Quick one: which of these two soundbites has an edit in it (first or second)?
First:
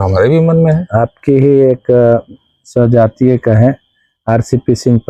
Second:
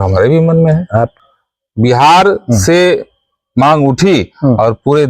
second